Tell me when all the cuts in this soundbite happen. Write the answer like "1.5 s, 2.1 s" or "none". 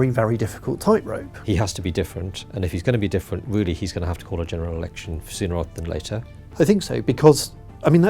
1.3 s, 6.4 s